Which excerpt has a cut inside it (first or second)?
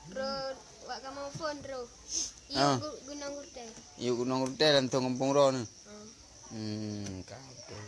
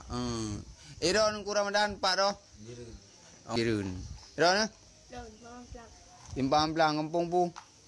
second